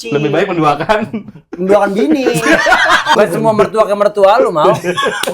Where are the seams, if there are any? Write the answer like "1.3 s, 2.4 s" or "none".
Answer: 3.2 s